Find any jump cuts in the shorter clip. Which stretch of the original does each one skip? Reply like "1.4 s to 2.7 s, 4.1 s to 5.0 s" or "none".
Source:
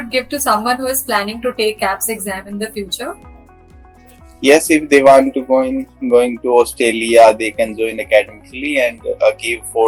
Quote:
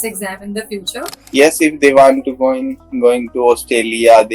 3.2 s to 4.3 s